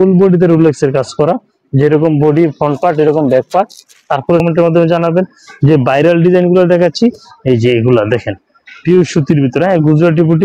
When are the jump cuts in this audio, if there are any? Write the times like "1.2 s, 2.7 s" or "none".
4.4 s